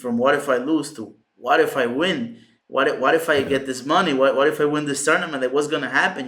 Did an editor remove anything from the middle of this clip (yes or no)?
no